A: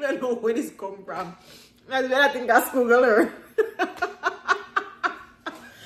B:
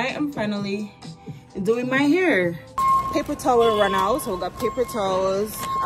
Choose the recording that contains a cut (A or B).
B